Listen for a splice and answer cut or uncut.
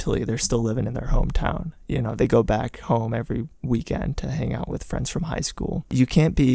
uncut